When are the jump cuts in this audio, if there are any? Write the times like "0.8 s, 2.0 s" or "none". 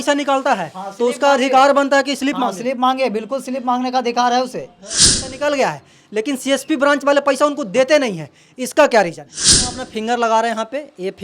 5.2 s, 9.7 s